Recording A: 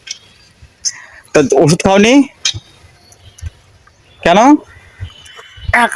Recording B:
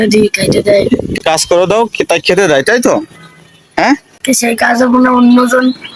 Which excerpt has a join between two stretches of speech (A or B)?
B